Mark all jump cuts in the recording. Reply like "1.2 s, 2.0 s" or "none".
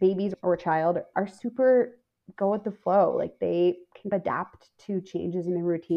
none